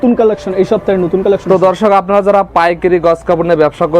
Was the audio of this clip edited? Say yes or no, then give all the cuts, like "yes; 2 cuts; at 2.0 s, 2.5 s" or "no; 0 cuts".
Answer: no; 0 cuts